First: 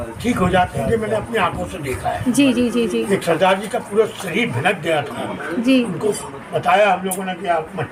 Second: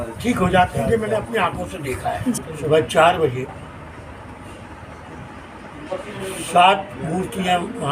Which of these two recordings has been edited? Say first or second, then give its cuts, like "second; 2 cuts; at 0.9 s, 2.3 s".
second; 1 cut; at 2.3 s